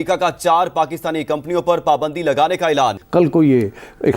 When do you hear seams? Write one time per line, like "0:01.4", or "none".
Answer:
0:03.0